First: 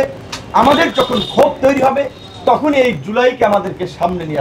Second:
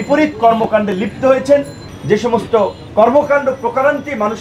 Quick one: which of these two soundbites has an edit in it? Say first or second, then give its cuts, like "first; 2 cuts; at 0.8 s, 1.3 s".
second; 1 cut; at 2.8 s